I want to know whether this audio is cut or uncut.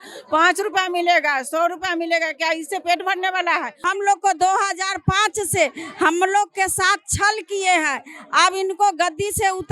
cut